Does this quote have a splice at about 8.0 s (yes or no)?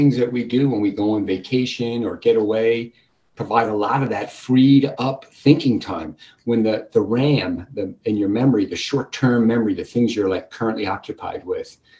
no